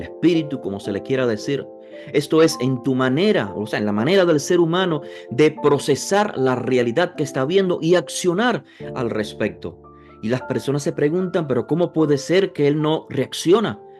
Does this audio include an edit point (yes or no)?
no